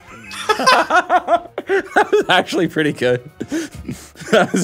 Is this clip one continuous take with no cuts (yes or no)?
yes